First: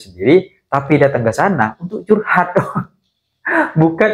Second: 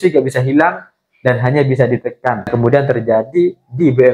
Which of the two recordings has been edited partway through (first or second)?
second